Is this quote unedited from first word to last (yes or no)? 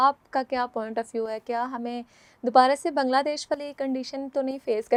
yes